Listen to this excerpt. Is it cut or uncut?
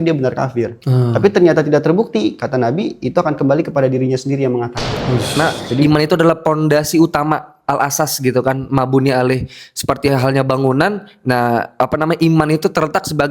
cut